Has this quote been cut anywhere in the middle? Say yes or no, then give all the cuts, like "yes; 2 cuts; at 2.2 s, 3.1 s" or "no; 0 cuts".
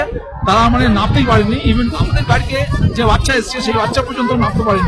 no; 0 cuts